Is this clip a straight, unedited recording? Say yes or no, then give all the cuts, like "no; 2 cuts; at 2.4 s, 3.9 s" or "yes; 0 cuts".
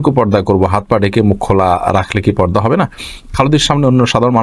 yes; 0 cuts